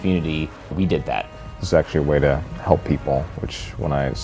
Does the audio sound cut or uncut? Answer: cut